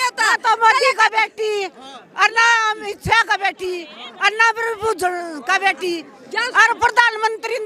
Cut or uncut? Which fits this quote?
uncut